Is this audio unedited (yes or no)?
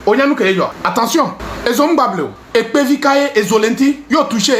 no